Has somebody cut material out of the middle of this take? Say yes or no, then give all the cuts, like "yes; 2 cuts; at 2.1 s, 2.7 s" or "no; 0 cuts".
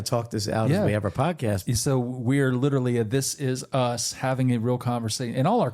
no; 0 cuts